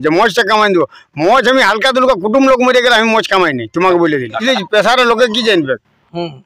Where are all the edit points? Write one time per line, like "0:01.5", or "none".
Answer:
0:04.4